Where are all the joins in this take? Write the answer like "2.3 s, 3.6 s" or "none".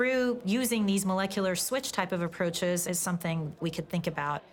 3.6 s